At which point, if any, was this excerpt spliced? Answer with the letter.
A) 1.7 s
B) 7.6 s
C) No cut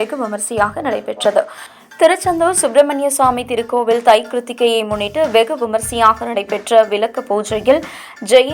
A